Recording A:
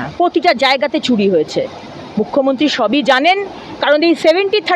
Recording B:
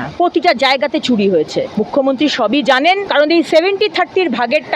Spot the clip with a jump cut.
B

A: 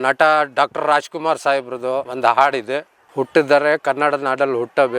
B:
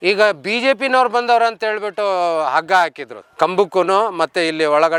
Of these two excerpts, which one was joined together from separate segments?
A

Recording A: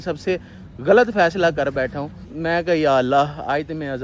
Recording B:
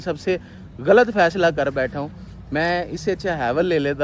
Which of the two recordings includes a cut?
A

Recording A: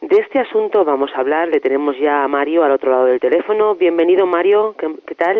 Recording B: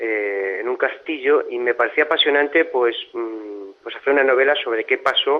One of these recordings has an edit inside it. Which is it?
A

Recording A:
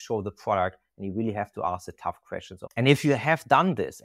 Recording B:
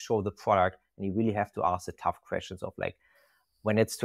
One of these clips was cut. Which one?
A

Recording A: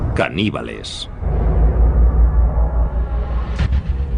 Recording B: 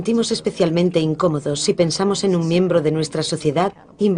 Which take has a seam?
A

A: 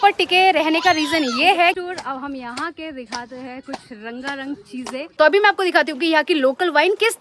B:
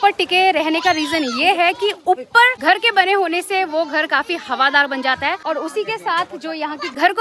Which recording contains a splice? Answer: A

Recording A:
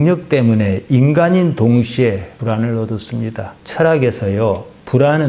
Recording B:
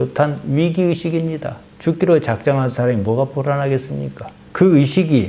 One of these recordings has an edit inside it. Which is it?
A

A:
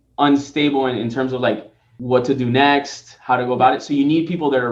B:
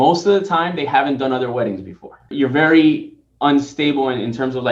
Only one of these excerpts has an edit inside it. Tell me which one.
B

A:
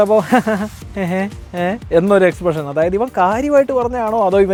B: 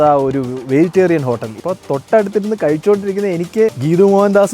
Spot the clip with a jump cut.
B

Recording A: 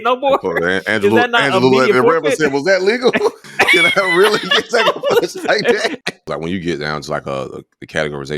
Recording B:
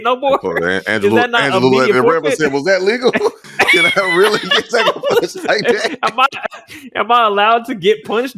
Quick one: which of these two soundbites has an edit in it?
A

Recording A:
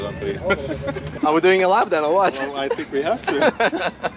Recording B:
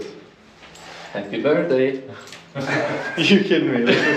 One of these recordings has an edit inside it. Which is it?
A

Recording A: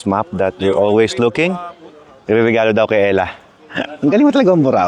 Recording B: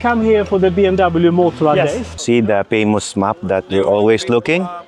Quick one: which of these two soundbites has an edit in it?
B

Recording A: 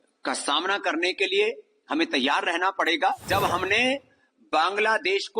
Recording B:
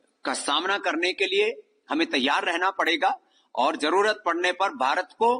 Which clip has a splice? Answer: A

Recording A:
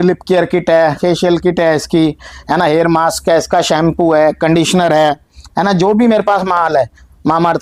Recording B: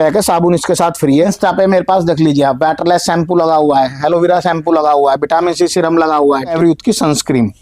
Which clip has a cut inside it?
B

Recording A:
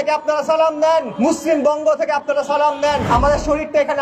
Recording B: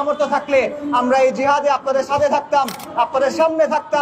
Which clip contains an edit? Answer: A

